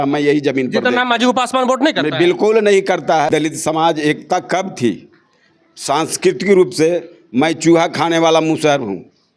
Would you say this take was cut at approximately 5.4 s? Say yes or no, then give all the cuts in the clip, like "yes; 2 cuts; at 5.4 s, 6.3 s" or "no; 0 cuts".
no; 1 cut; at 3.3 s